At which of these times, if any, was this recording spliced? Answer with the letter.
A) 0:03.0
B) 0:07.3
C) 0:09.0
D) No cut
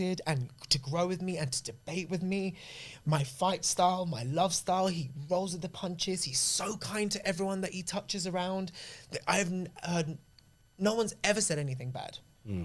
D